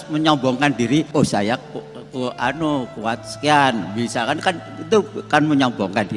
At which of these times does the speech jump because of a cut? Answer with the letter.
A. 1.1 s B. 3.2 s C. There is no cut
A